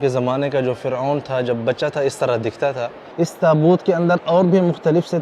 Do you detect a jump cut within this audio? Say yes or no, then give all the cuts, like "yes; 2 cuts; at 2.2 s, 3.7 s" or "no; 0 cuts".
yes; 1 cut; at 3.0 s